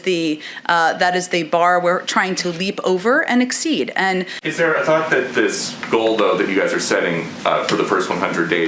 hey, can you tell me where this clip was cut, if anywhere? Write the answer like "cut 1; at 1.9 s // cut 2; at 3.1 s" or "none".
cut 1; at 4.4 s